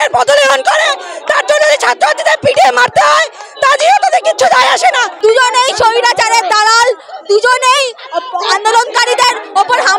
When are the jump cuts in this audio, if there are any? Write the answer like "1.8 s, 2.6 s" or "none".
5.1 s